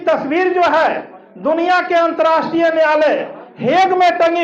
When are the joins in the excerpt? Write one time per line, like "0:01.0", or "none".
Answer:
none